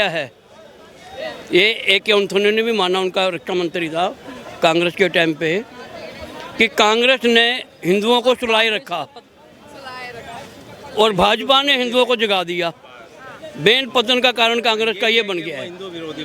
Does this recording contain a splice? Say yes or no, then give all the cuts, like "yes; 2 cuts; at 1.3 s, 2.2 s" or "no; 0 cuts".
no; 0 cuts